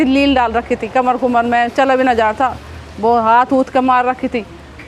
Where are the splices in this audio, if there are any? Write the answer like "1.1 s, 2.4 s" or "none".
none